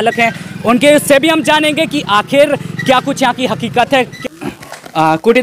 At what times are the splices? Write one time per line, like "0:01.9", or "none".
0:04.1